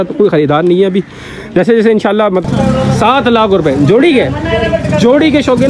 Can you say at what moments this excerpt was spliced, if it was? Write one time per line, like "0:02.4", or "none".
0:02.4